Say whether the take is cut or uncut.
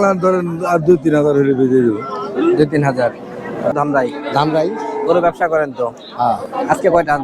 cut